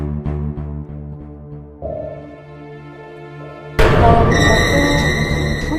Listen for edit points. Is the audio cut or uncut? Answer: uncut